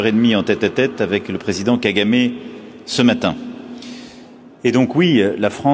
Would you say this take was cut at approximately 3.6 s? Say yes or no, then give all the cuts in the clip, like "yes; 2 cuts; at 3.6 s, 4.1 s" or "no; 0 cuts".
no; 0 cuts